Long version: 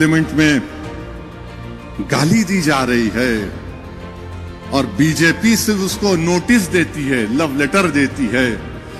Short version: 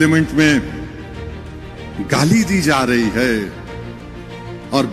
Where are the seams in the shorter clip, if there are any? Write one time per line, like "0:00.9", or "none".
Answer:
none